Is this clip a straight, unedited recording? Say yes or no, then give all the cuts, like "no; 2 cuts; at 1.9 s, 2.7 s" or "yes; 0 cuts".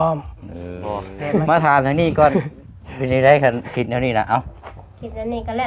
no; 1 cut; at 1.1 s